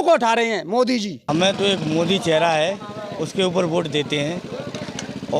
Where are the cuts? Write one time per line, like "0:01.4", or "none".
0:01.2

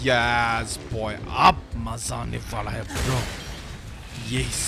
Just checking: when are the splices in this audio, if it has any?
none

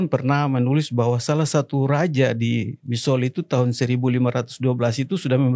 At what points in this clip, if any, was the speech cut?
none

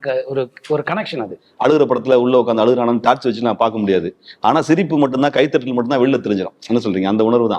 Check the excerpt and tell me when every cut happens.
0:01.3

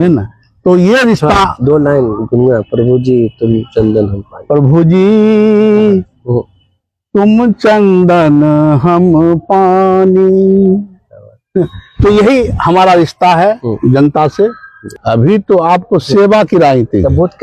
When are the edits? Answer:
0:14.9

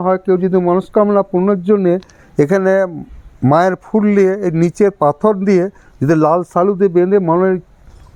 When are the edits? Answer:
none

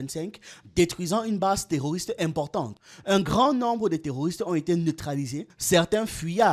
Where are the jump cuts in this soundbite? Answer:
0:02.9

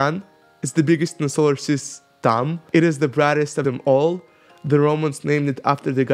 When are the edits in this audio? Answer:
0:02.6

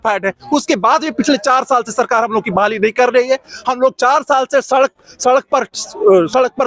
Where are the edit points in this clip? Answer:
none

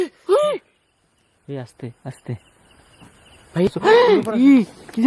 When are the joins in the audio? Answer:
0:03.7

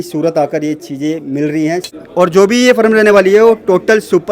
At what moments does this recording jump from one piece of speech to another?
0:01.9

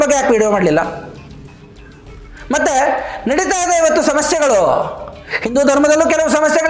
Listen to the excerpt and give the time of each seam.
none

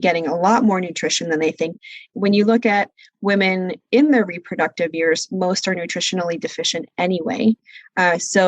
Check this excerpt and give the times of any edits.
0:02.1

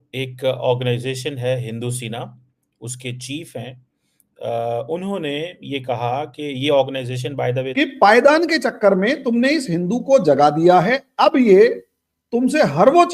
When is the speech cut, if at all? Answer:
0:07.7

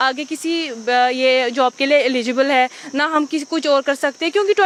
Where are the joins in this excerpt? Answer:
none

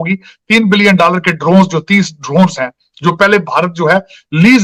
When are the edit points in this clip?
none

